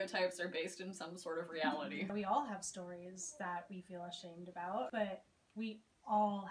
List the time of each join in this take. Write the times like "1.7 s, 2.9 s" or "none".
2.1 s, 4.9 s